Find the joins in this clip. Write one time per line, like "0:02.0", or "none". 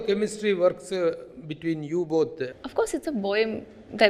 0:02.5